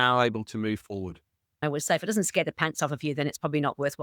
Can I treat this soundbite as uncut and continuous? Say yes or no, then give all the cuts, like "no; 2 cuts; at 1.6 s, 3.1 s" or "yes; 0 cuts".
no; 1 cut; at 1.6 s